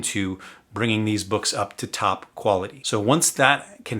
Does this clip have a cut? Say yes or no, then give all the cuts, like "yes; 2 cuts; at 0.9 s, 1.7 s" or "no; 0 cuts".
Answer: yes; 1 cut; at 2.8 s